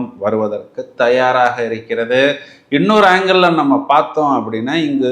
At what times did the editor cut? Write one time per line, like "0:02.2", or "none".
none